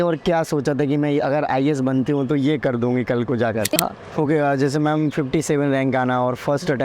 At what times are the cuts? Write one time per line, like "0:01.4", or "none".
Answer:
0:03.9

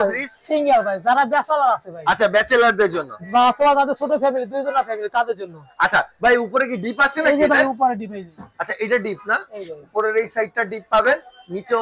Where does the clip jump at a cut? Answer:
none

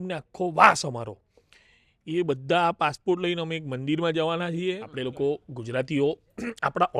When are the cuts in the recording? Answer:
0:04.9

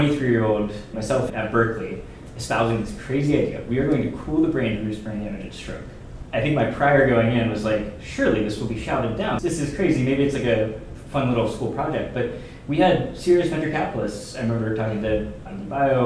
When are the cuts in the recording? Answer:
none

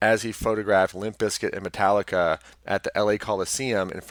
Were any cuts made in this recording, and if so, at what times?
none

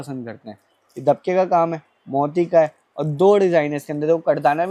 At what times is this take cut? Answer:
none

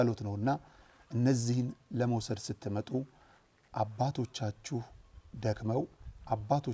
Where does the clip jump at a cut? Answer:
none

